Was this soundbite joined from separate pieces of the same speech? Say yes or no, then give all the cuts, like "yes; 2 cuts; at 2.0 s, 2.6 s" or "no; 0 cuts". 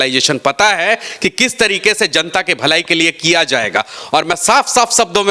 no; 0 cuts